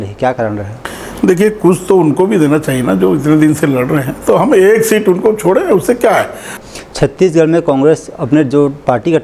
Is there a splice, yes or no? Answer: yes